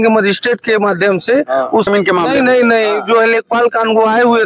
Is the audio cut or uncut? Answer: cut